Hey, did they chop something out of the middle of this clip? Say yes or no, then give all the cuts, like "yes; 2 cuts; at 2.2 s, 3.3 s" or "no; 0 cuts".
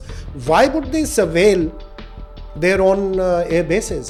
no; 0 cuts